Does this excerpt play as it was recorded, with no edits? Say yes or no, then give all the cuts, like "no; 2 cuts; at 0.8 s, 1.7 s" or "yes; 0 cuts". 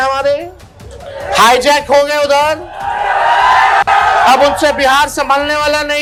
yes; 0 cuts